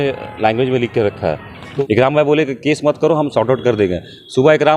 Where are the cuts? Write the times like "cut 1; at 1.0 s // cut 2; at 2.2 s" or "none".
cut 1; at 1.6 s